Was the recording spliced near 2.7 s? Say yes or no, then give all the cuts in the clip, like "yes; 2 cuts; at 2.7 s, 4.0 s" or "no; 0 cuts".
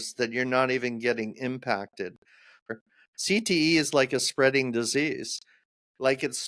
yes; 1 cut; at 2.7 s